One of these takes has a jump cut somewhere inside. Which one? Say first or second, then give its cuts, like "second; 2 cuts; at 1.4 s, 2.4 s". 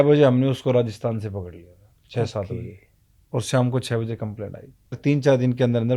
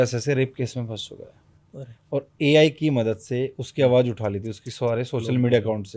first; 1 cut; at 5.0 s